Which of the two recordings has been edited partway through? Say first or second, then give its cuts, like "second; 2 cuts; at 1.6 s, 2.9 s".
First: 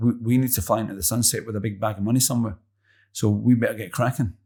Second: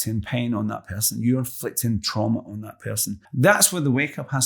second; 1 cut; at 3.2 s